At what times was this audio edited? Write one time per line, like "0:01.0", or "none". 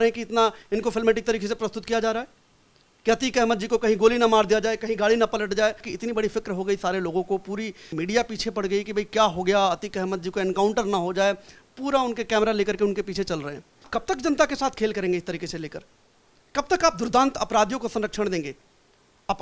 0:05.9
0:07.9
0:13.9